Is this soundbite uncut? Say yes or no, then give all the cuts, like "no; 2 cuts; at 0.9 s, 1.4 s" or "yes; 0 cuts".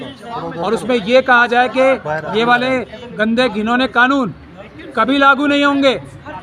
yes; 0 cuts